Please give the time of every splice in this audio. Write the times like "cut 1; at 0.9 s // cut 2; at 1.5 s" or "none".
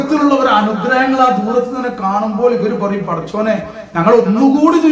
none

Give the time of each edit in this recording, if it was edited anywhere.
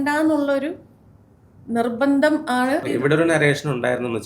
cut 1; at 2.8 s

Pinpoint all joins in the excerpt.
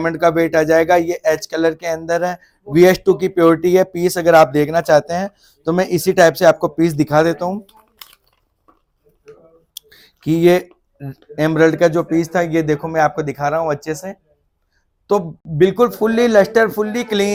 none

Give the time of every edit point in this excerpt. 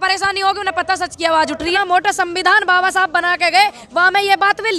cut 1; at 1.7 s

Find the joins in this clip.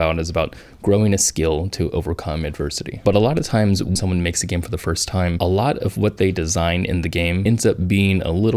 cut 1; at 3.9 s // cut 2; at 7.4 s

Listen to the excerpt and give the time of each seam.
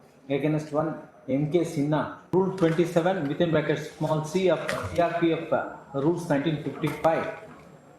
cut 1; at 2.2 s

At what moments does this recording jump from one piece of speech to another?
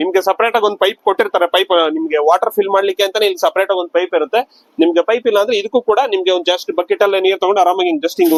none

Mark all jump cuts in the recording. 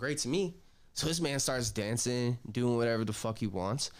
none

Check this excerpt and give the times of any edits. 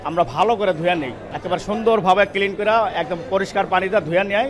none

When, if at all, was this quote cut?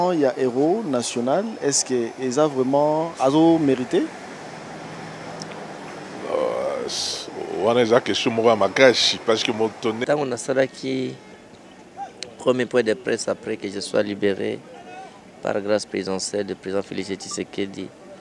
cut 1; at 10.0 s

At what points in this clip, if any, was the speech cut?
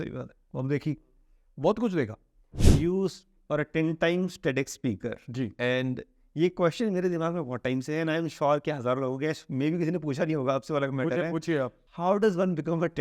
cut 1; at 2.6 s // cut 2; at 11.8 s

